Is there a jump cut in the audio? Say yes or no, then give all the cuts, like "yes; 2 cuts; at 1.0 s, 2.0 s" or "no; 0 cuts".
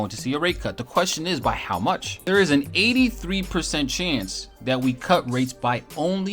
yes; 1 cut; at 2.1 s